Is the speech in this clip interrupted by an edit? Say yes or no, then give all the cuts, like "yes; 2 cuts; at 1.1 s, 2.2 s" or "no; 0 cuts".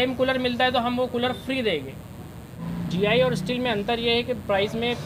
yes; 1 cut; at 2.6 s